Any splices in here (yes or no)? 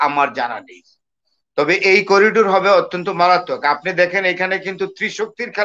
no